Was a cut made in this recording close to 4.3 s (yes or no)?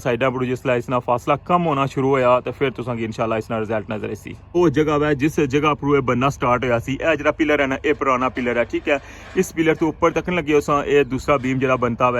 yes